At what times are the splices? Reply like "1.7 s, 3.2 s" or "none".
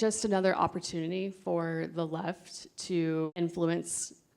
3.3 s